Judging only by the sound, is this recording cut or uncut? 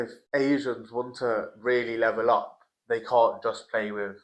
uncut